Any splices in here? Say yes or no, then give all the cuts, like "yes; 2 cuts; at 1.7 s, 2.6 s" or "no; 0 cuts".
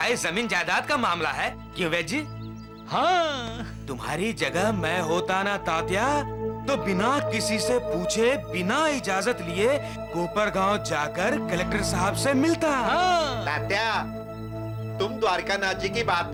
no; 0 cuts